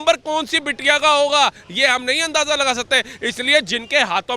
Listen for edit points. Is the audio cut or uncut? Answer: uncut